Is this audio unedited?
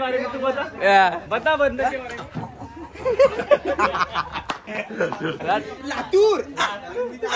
no; 1 cut; at 5.4 s

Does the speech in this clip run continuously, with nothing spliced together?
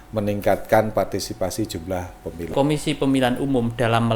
no; 1 cut; at 2.5 s

